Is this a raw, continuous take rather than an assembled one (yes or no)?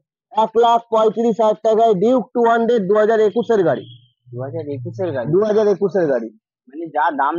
yes